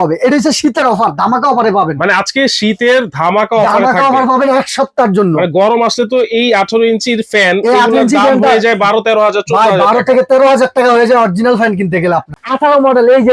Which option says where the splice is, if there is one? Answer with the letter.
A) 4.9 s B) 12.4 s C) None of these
B